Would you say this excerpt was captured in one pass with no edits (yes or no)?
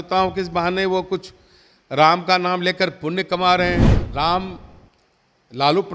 no